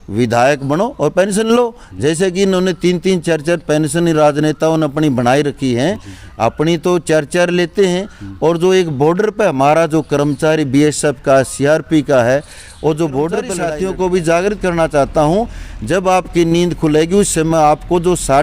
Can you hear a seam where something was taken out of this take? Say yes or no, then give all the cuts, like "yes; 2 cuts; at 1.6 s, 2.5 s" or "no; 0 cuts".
yes; 1 cut; at 13.6 s